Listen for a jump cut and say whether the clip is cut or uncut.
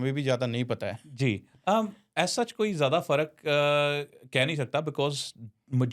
uncut